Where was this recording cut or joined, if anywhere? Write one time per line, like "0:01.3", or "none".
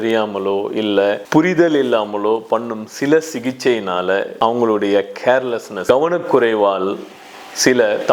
0:01.2
0:04.3
0:05.7

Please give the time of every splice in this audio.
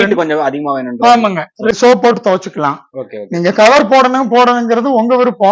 0:01.7

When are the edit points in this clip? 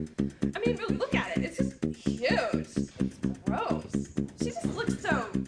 none

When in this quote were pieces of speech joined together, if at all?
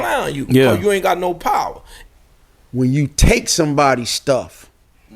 0:01.9

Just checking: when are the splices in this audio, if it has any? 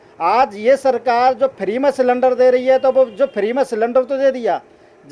none

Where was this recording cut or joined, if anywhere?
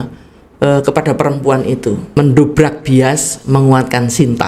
0:02.1

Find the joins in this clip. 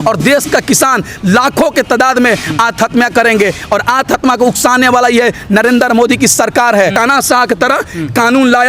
0:06.9

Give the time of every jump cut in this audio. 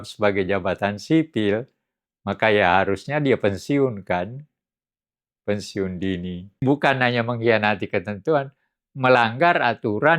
0:06.5

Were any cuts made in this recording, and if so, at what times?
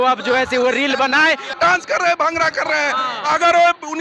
0:01.6

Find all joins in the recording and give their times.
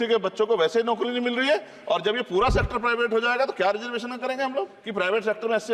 0:04.8

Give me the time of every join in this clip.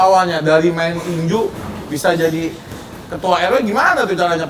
none

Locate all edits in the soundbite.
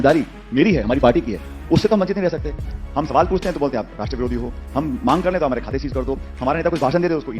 0:02.8

